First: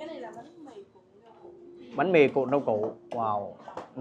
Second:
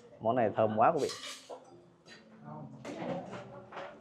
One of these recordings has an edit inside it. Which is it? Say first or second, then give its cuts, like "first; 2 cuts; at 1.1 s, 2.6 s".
second; 1 cut; at 2.9 s